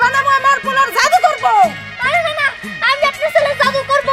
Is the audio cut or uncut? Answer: uncut